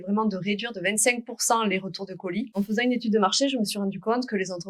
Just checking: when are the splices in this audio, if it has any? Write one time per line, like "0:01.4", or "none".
0:02.5